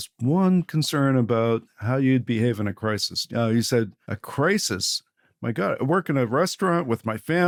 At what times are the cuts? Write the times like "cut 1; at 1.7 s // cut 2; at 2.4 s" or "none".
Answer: none